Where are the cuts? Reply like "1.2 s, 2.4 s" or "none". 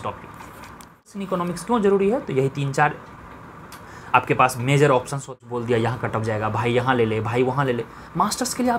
1.2 s, 5.4 s

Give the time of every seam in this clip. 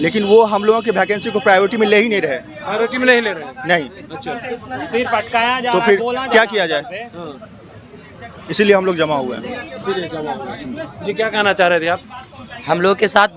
none

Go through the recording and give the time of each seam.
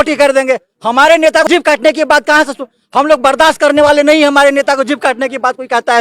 1.5 s

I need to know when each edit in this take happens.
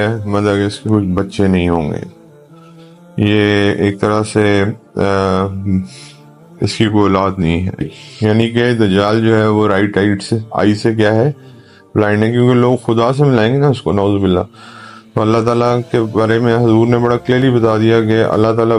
8.0 s

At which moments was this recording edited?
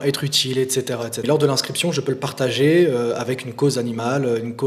1.2 s

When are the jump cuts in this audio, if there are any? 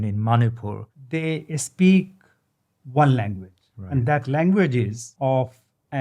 0.9 s, 5.0 s

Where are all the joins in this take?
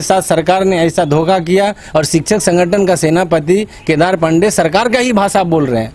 none

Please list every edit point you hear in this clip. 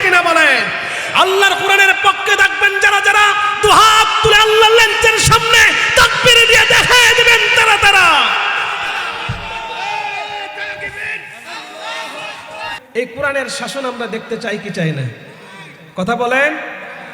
12.8 s

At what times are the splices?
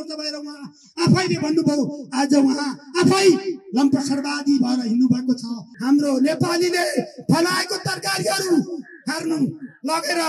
5.7 s

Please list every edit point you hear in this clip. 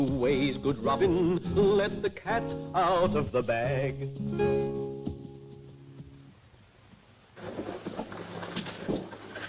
8.2 s

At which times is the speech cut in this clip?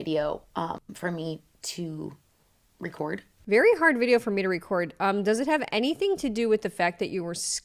none

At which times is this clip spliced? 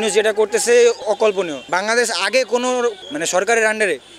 1.0 s, 3.0 s

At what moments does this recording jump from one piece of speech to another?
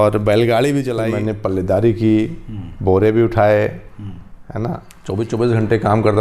1.0 s, 4.9 s

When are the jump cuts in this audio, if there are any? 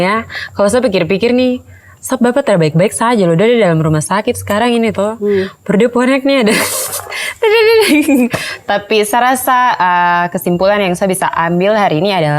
none

